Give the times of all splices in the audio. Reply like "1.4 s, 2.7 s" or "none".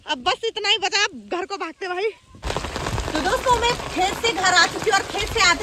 2.3 s